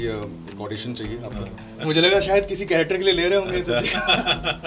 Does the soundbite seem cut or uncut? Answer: cut